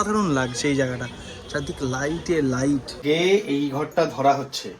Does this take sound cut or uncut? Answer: cut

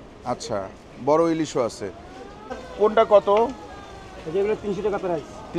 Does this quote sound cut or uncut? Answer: cut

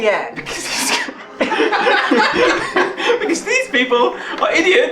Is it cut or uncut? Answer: uncut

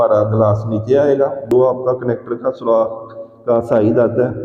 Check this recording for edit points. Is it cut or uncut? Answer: cut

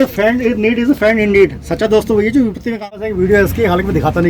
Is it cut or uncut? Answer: cut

